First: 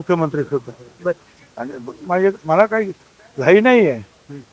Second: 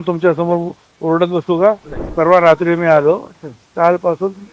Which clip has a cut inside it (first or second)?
second